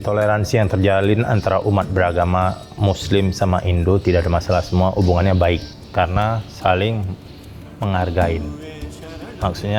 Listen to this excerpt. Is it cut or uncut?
cut